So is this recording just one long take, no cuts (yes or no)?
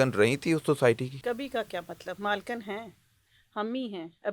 no